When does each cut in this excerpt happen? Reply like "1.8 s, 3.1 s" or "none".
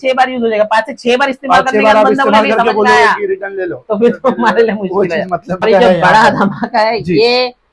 5.6 s